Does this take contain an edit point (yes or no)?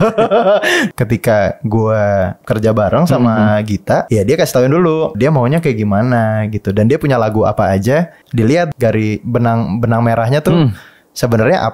yes